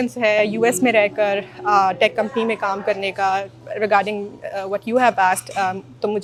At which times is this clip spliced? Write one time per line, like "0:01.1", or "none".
none